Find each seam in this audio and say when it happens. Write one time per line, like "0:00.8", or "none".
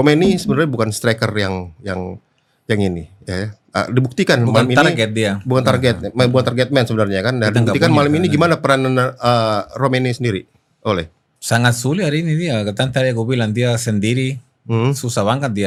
none